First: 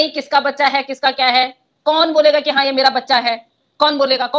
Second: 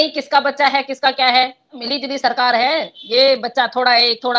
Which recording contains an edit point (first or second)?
second